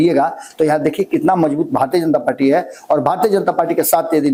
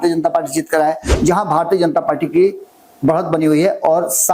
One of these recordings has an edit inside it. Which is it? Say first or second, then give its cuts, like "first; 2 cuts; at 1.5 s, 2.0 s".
second; 1 cut; at 1.1 s